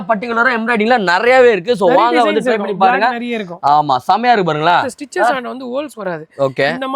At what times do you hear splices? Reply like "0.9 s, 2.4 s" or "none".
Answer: 5.3 s